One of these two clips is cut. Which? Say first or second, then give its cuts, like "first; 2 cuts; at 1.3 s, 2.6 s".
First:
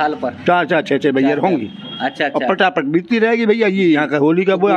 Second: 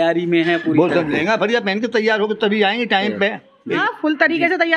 second; 1 cut; at 3.7 s